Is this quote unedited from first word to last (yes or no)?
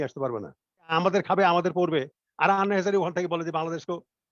no